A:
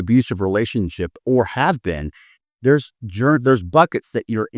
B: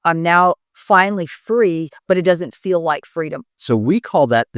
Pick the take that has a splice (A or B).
B